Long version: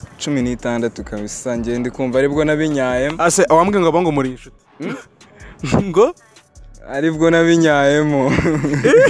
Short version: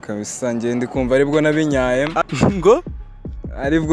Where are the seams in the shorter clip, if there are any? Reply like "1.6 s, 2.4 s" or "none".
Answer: 2.2 s